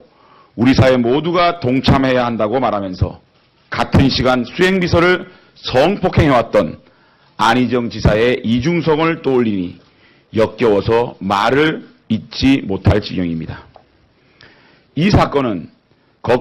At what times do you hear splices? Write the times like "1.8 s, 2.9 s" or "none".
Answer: 2.9 s